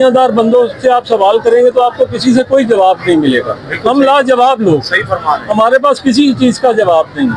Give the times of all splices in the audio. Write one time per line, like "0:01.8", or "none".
none